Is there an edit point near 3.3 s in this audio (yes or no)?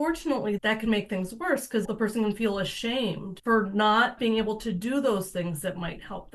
yes